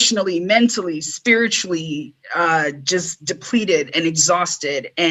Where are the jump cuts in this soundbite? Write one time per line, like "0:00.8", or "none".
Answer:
none